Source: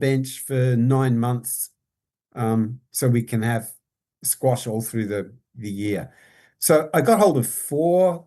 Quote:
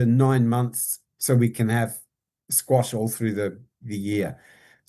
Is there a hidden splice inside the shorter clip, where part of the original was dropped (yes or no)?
yes